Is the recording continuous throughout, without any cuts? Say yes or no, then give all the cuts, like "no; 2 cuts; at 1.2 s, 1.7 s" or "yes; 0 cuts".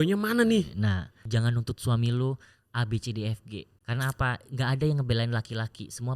no; 2 cuts; at 1.2 s, 3.7 s